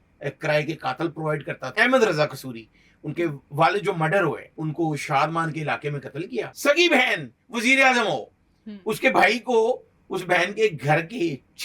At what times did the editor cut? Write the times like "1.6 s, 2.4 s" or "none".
1.6 s, 4.5 s, 6.5 s